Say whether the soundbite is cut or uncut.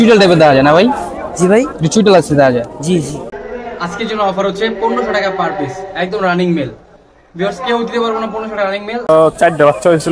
cut